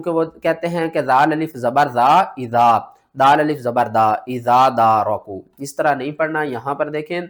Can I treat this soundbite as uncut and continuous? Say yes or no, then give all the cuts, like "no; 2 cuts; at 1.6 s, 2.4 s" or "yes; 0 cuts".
yes; 0 cuts